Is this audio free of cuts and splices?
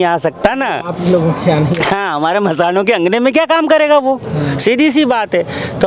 yes; 0 cuts

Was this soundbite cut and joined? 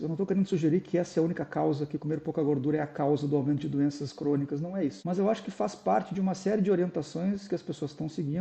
yes; 1 cut; at 5.0 s

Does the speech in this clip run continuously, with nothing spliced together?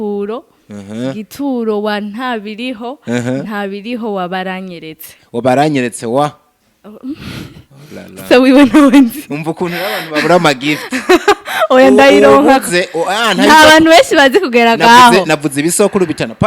yes; 0 cuts

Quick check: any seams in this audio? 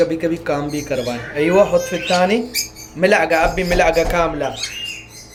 no; 0 cuts

